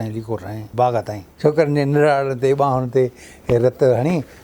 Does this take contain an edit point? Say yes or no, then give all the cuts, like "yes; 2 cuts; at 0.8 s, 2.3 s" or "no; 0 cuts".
yes; 1 cut; at 1.2 s